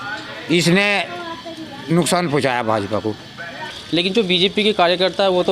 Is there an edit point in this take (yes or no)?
yes